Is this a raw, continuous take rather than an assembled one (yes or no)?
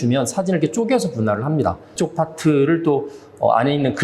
no